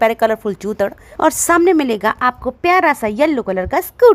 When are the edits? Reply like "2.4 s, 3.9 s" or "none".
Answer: none